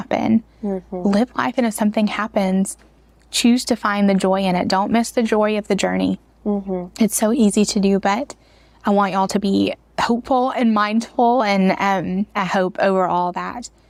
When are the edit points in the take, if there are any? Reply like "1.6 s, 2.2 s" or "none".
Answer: none